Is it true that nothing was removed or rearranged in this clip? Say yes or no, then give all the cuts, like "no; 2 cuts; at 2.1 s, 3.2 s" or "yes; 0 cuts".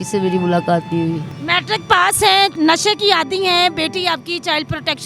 no; 2 cuts; at 1.3 s, 2.5 s